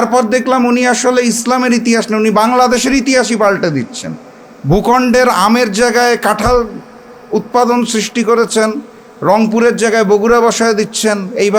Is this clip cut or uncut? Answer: uncut